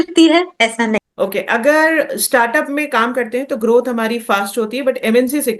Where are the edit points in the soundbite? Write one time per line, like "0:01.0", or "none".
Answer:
0:01.0